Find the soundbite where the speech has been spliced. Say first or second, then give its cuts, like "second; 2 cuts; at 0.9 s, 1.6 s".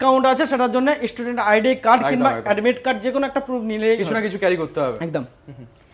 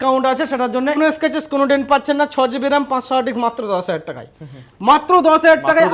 second; 1 cut; at 1.0 s